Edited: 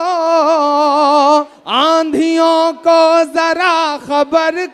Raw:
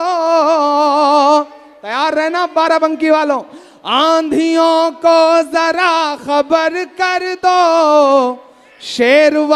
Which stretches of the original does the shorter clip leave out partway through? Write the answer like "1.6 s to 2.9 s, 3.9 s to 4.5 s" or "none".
1.6 s to 3.8 s